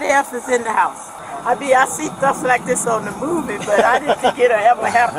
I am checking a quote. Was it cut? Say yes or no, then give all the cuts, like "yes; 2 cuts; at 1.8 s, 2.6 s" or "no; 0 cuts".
yes; 1 cut; at 1.2 s